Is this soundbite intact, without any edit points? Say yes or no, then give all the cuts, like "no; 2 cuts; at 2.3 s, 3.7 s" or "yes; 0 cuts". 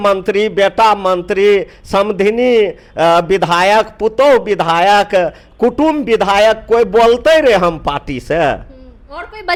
yes; 0 cuts